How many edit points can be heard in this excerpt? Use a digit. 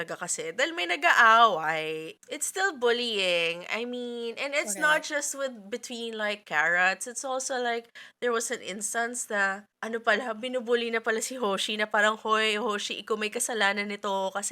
2